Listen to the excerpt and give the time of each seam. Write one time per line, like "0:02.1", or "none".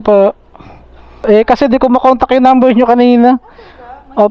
0:01.1